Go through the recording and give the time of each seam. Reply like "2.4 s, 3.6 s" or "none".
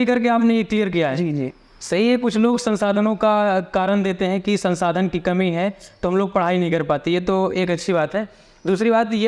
none